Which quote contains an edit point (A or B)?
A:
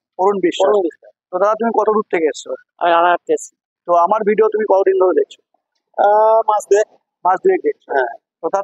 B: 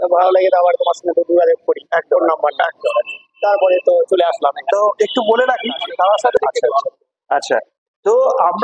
B